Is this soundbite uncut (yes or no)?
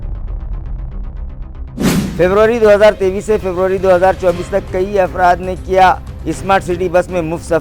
no